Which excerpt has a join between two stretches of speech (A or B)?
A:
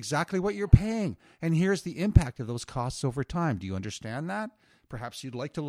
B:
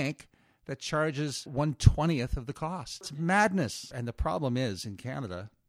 B